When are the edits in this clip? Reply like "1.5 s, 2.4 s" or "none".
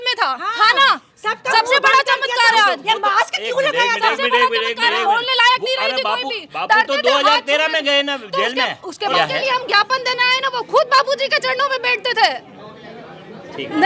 9.1 s